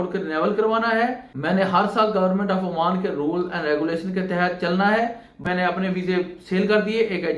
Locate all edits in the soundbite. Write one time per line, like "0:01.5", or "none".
0:01.3
0:05.4